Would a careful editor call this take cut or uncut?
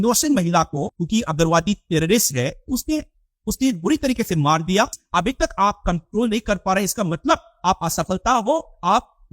cut